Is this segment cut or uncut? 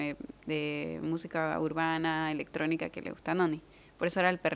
uncut